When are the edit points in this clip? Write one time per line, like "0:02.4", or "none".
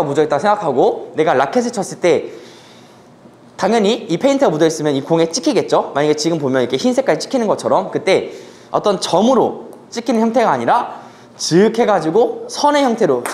none